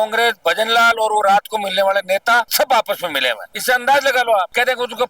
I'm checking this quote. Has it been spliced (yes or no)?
no